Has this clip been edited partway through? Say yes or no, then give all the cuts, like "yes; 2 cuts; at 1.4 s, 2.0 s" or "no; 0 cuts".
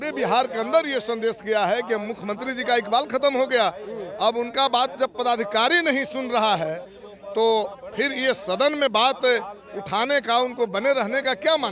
no; 0 cuts